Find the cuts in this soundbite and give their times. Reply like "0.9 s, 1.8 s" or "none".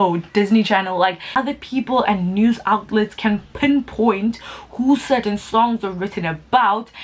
1.3 s